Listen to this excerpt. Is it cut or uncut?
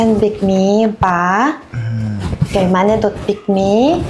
uncut